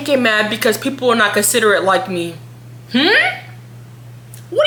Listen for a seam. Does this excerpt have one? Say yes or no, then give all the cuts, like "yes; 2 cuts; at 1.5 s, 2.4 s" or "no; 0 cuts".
no; 0 cuts